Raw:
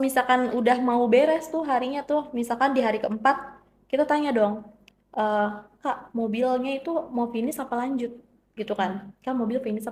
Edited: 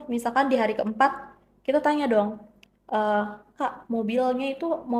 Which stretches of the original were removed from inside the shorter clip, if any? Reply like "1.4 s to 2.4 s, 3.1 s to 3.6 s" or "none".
none